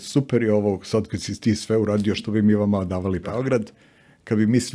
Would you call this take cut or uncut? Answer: cut